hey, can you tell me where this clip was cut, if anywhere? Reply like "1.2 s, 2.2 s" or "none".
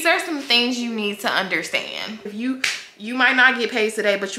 2.3 s